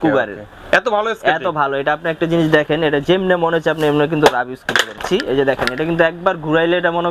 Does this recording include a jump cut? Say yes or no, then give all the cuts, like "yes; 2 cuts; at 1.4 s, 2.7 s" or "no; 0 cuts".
yes; 1 cut; at 5.0 s